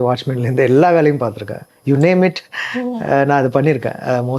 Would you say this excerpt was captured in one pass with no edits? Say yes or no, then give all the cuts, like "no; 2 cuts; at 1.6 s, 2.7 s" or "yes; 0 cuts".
yes; 0 cuts